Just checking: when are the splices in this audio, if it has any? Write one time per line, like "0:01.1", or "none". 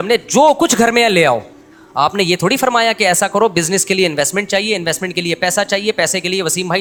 none

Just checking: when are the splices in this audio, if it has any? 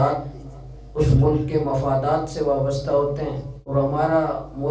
0:03.7

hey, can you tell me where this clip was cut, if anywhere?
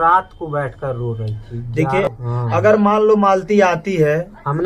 0:02.1

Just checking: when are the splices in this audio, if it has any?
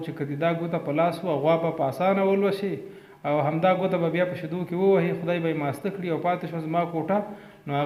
none

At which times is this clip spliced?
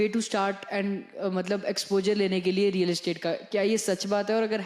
none

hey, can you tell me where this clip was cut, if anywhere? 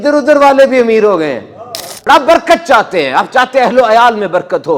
0:01.9

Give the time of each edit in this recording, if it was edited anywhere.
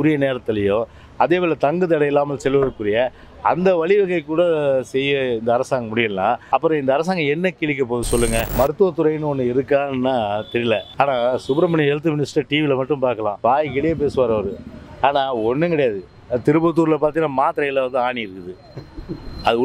0:06.4
0:08.5
0:10.9
0:13.3

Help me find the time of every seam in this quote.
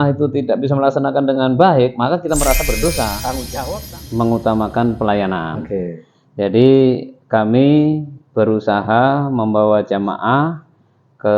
0:03.5

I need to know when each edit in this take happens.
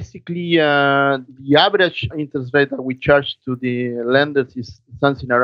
0:01.3
0:02.1

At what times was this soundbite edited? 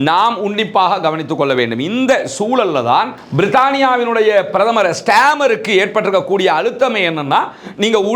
0:03.2

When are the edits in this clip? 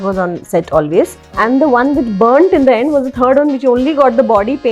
0:01.2

